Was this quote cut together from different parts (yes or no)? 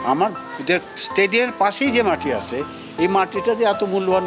no